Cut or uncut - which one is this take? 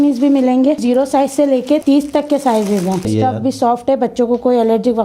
cut